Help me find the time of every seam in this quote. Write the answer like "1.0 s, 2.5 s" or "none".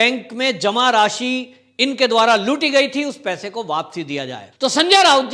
4.4 s